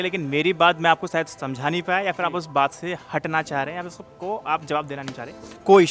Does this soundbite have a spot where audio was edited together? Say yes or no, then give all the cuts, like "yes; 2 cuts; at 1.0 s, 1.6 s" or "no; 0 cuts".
no; 0 cuts